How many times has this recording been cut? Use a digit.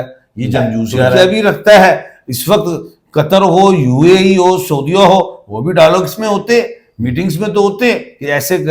1